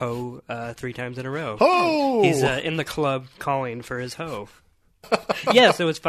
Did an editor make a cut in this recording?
yes; 1 cut; at 5.1 s

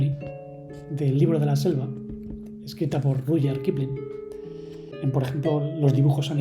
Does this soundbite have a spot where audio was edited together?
no; 0 cuts

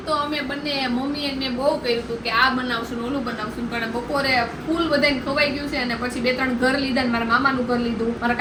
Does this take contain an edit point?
no; 0 cuts

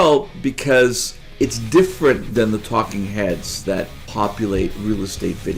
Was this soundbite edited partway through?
yes; 3 cuts; at 1.2 s, 2.2 s, 4.0 s

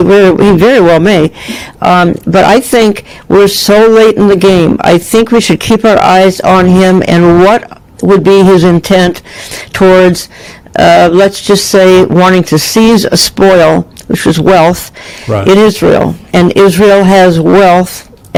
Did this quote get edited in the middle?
no; 0 cuts

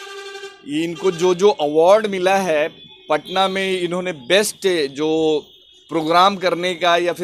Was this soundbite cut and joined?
no; 0 cuts

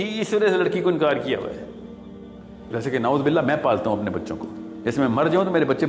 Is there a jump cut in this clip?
yes; 1 cut; at 2.7 s

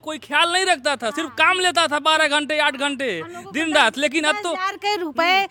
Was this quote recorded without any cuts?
yes; 0 cuts

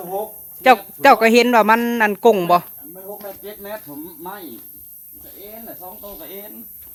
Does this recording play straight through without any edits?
yes; 0 cuts

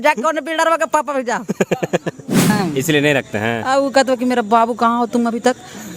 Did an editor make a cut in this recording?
yes; 1 cut; at 2.4 s

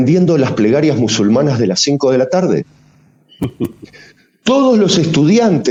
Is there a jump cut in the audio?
no; 0 cuts

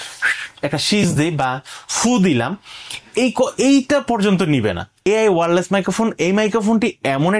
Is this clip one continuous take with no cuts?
no; 1 cut; at 4.9 s

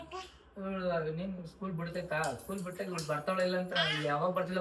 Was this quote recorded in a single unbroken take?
yes; 0 cuts

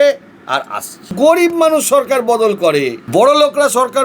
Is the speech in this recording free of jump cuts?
no; 2 cuts; at 1.1 s, 3.0 s

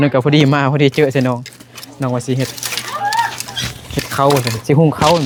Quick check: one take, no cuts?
yes; 0 cuts

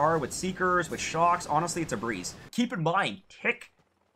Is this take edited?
yes; 1 cut; at 2.4 s

